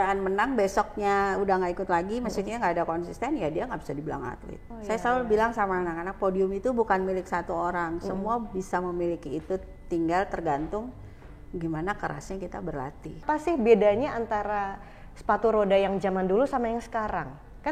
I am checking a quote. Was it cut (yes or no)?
yes